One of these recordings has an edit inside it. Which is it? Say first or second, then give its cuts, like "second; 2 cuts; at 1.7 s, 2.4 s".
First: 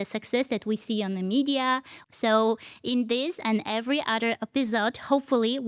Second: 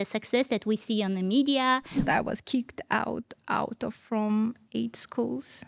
second; 1 cut; at 2.0 s